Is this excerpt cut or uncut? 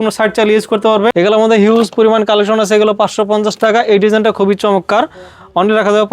cut